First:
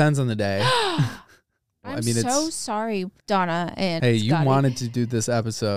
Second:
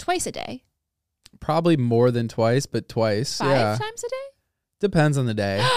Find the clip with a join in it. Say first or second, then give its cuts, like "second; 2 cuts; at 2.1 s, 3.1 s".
first; 2 cuts; at 1.9 s, 3.1 s